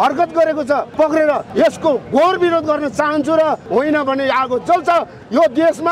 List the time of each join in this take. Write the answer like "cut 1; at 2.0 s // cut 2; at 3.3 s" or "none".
cut 1; at 0.9 s // cut 2; at 1.5 s // cut 3; at 3.6 s